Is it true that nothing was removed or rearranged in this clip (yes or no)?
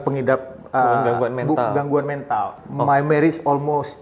no